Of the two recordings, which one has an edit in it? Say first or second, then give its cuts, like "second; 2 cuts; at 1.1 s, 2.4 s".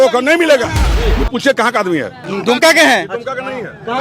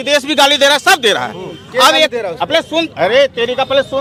first; 2 cuts; at 0.9 s, 2.2 s